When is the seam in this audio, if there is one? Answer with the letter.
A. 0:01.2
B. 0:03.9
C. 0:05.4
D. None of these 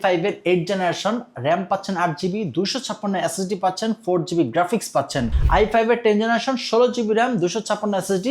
C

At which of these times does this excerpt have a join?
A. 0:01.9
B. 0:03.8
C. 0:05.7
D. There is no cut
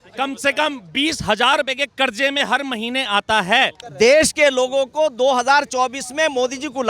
B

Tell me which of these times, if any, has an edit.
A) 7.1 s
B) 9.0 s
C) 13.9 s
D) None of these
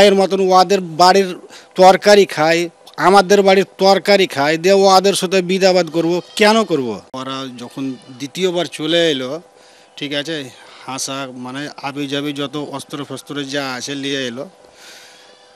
A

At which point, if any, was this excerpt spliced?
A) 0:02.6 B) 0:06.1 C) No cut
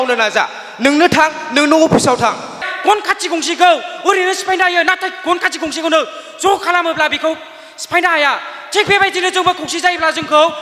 A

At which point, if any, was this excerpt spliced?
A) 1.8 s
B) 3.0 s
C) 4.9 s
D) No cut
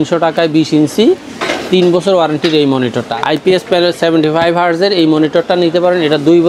B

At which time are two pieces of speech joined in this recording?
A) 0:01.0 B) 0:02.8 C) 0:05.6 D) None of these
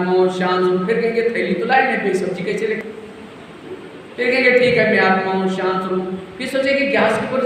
B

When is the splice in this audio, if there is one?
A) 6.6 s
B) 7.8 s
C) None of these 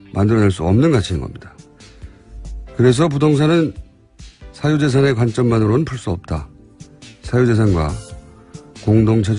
B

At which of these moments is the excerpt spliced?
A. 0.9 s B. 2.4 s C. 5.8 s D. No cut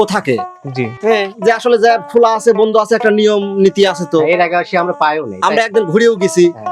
D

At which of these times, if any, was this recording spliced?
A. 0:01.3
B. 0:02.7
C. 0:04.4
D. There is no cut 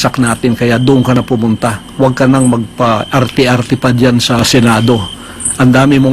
C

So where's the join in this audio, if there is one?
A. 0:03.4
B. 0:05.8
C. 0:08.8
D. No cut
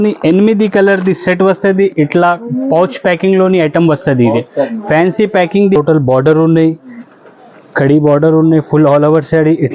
B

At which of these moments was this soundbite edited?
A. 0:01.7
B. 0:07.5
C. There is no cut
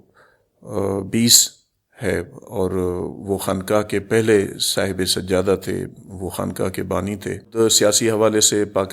B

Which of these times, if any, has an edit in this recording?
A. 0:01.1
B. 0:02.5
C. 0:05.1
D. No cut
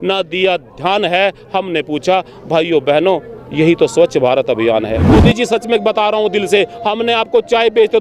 C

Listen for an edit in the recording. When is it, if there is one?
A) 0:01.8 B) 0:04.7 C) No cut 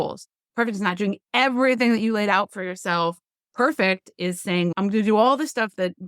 B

